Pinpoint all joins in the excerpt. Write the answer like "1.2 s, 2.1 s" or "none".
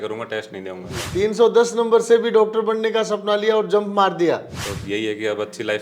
1.0 s, 4.7 s